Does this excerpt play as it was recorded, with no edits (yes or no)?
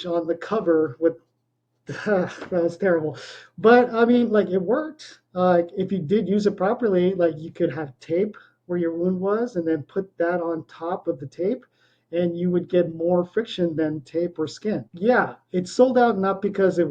no